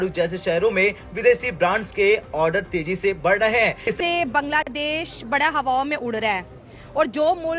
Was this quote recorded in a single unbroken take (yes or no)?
no